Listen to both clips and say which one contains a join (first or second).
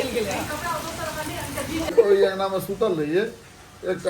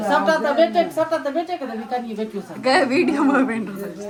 first